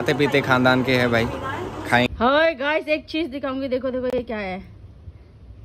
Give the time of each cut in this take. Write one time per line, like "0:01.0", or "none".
0:02.1